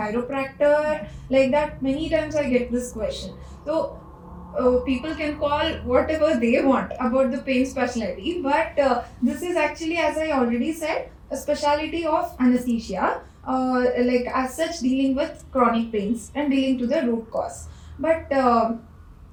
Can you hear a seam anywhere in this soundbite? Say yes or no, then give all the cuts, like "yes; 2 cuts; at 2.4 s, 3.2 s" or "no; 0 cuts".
no; 0 cuts